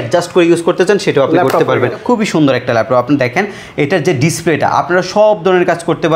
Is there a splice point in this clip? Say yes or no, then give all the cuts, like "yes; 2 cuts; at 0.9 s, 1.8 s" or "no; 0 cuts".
yes; 1 cut; at 2.0 s